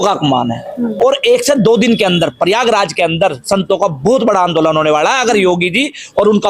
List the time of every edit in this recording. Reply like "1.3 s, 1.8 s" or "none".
1.0 s